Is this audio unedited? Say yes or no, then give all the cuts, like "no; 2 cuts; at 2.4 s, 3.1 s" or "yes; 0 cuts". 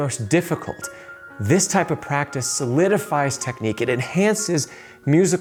yes; 0 cuts